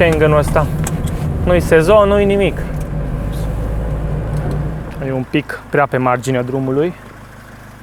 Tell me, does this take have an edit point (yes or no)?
yes